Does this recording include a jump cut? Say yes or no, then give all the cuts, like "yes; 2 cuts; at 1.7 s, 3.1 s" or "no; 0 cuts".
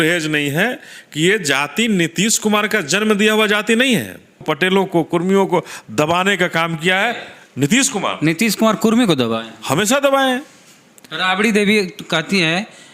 yes; 1 cut; at 4.5 s